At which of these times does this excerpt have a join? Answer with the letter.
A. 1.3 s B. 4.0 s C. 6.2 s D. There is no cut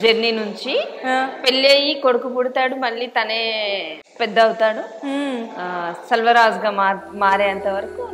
B